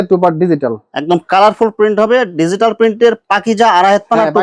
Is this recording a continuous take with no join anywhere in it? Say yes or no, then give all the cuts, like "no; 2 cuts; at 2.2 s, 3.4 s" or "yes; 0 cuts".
yes; 0 cuts